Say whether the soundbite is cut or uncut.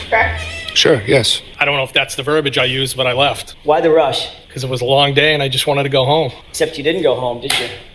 cut